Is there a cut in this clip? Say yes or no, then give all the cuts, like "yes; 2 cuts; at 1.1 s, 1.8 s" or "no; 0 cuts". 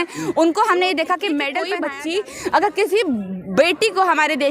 yes; 1 cut; at 1.6 s